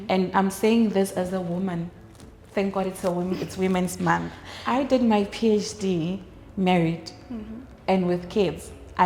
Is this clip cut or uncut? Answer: cut